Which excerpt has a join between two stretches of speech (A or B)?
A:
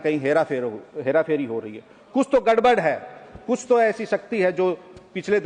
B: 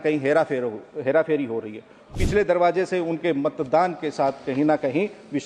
B